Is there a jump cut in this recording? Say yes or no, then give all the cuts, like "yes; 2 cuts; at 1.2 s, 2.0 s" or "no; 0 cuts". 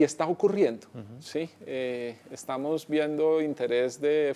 no; 0 cuts